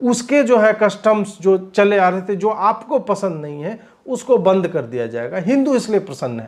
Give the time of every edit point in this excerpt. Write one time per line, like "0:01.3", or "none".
none